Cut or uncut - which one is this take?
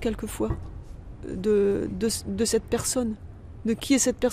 uncut